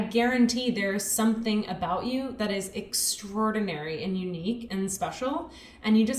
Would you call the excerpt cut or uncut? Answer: uncut